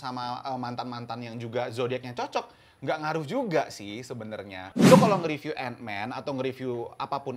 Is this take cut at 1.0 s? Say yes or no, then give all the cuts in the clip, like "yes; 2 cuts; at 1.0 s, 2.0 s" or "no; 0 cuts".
no; 1 cut; at 4.7 s